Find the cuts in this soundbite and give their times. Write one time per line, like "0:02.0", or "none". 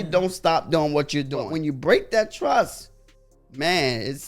0:01.4